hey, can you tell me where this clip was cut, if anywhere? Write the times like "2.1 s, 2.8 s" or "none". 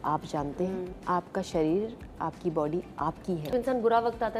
0.9 s, 3.5 s